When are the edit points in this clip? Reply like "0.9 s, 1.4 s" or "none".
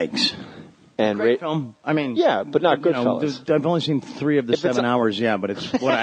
none